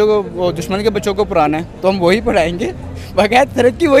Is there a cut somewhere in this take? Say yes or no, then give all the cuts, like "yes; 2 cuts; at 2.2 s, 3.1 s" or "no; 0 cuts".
no; 0 cuts